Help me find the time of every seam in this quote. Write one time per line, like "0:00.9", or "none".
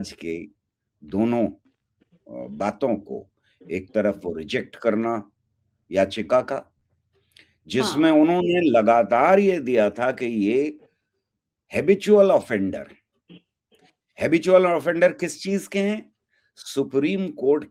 none